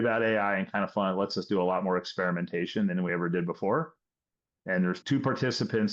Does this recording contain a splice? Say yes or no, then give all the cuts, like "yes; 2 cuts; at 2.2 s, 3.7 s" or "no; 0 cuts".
yes; 1 cut; at 5.0 s